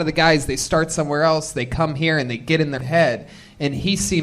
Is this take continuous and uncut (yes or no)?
no